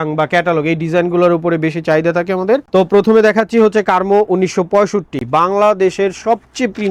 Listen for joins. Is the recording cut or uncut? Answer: uncut